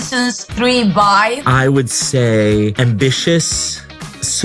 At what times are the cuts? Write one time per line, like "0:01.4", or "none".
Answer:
none

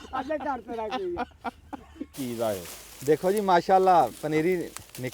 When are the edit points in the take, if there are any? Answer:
0:02.1

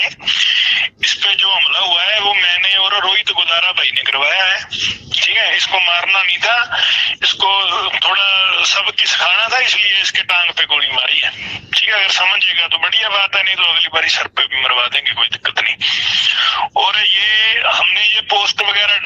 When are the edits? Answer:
0:02.5

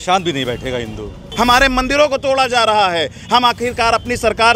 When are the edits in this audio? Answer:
0:01.2

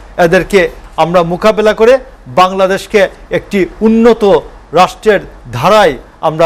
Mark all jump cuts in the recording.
none

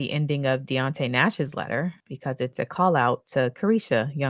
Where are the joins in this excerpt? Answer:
0:02.1

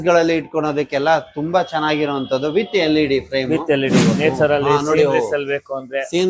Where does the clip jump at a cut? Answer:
0:04.2

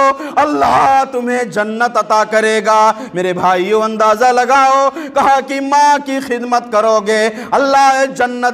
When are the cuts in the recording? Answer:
none

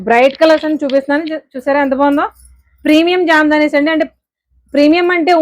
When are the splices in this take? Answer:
none

